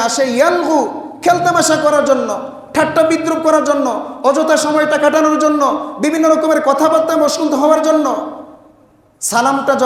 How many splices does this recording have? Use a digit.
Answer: 0